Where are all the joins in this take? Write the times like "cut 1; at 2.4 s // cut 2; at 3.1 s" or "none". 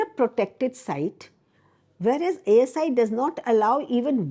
none